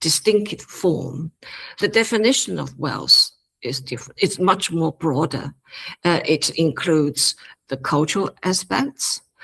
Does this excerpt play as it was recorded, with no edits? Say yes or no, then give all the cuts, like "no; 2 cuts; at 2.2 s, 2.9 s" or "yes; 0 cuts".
no; 1 cut; at 1.7 s